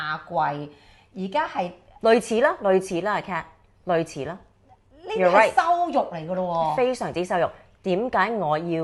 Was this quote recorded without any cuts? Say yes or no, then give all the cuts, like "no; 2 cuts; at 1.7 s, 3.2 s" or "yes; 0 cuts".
yes; 0 cuts